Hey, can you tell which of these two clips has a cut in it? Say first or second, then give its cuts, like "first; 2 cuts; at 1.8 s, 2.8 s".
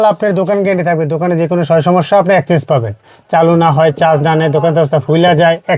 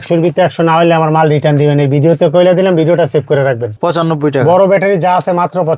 second; 1 cut; at 3.7 s